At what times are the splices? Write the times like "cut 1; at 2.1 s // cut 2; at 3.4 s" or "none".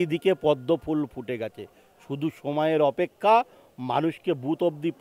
none